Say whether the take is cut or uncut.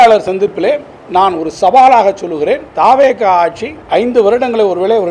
cut